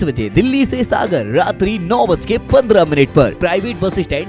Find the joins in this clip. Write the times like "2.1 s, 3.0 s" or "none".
3.3 s